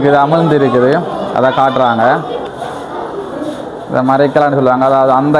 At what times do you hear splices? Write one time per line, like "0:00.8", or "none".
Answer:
0:02.4